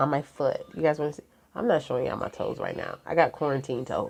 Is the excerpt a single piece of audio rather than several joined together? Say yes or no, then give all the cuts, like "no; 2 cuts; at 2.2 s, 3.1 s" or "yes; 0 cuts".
yes; 0 cuts